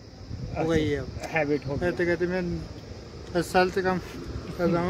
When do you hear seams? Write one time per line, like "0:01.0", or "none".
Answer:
none